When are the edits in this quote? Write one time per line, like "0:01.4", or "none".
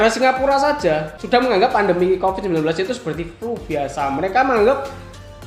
0:01.1